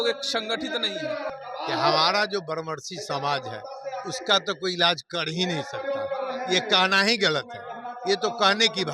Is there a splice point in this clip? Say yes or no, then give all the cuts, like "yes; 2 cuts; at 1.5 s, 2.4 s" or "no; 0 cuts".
yes; 1 cut; at 1.3 s